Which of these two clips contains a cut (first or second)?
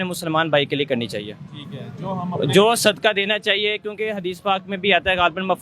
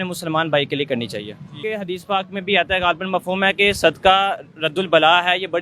second